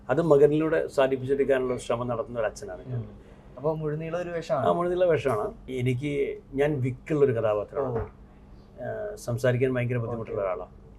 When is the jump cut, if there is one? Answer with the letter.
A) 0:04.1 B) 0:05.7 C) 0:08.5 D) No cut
B